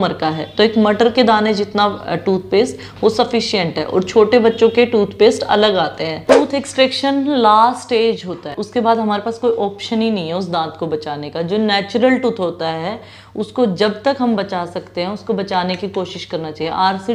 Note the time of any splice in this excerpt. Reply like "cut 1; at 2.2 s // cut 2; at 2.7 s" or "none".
cut 1; at 6.2 s // cut 2; at 8.6 s